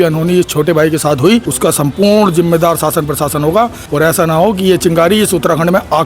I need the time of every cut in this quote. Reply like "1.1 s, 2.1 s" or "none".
1.5 s, 3.8 s

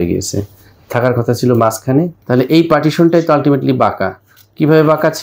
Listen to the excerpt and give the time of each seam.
2.2 s

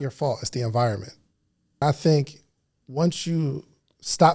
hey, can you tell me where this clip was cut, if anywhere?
1.8 s

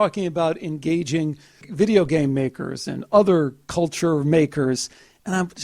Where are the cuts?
1.6 s

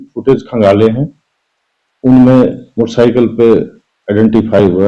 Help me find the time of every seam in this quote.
none

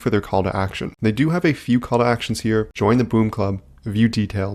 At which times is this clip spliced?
none

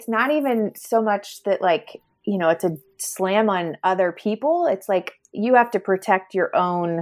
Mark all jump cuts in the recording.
none

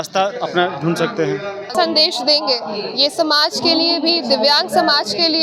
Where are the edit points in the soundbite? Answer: none

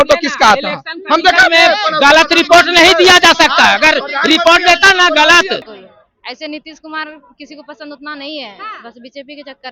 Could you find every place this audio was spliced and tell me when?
5.7 s

